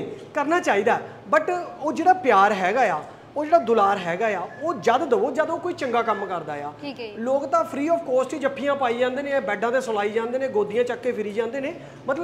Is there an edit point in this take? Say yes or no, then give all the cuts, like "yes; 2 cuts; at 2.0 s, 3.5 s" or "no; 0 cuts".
no; 0 cuts